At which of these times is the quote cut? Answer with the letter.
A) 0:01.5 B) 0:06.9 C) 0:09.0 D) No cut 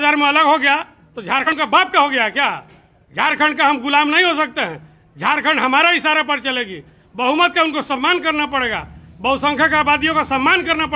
A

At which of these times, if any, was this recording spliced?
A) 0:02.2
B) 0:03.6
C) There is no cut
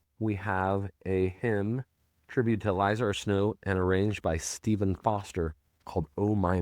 C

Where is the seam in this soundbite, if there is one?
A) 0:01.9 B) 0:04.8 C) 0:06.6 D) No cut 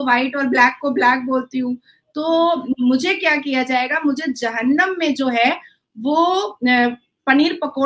D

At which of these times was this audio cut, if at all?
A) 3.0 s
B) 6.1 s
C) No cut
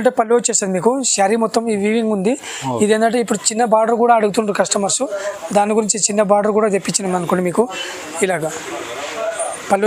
C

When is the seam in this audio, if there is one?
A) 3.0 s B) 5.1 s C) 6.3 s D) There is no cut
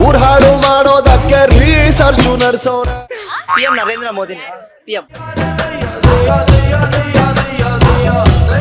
A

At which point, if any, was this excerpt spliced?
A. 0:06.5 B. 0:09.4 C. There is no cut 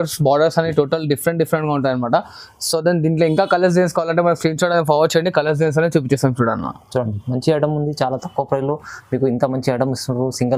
C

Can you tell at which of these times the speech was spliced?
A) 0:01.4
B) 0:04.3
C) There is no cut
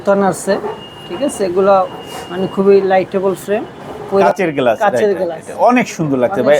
B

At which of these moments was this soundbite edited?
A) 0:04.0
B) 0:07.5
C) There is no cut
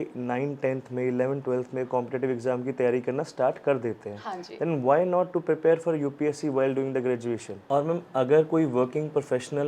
B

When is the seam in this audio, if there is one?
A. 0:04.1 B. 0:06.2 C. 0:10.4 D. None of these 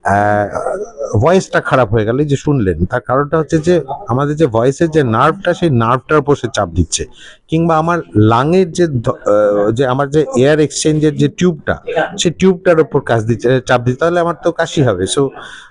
D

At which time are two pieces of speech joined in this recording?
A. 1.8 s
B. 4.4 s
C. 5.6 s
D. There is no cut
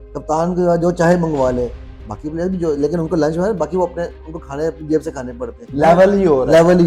C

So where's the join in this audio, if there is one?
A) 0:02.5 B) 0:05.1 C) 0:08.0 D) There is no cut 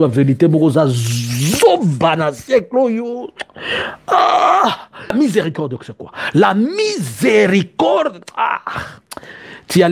B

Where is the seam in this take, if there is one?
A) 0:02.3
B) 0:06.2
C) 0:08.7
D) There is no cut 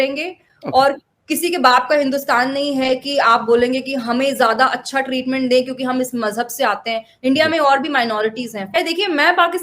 C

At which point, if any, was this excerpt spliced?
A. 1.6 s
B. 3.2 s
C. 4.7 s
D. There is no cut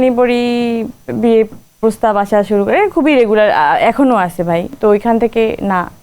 C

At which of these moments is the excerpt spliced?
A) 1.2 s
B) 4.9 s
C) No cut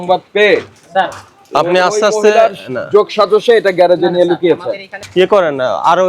B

